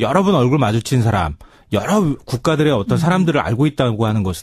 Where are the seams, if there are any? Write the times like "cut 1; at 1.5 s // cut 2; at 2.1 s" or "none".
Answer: none